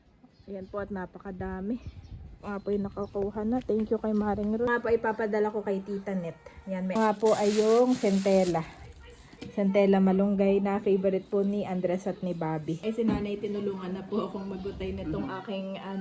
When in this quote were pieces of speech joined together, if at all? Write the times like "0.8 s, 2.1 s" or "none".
4.7 s, 7.0 s, 12.8 s

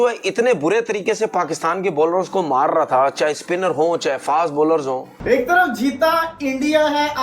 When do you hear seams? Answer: 5.2 s

